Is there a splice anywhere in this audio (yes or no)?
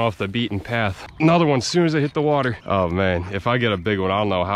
yes